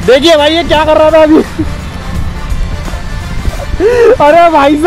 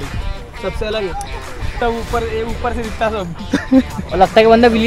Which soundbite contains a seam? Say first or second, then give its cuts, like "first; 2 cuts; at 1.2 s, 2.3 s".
second; 1 cut; at 1.7 s